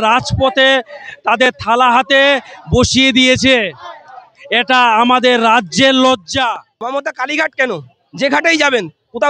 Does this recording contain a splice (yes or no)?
yes